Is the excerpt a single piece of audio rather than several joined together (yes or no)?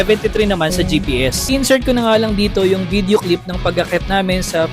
no